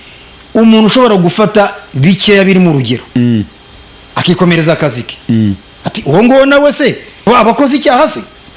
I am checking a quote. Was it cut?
no; 0 cuts

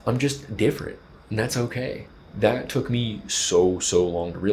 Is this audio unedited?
no; 1 cut; at 2.1 s

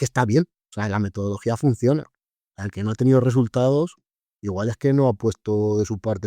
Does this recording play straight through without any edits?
no; 1 cut; at 2.8 s

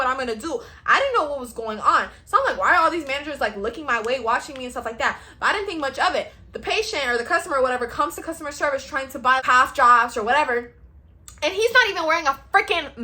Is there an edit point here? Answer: yes; 1 cut; at 9.4 s

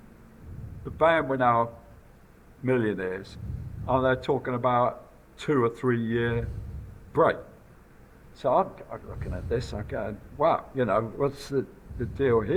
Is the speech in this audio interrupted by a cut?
no; 0 cuts

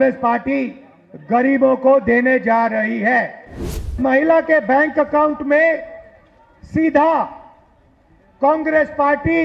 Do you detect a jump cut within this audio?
yes; 1 cut; at 4.0 s

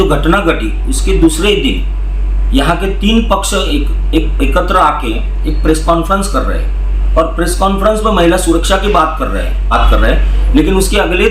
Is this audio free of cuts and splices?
no; 1 cut; at 9.7 s

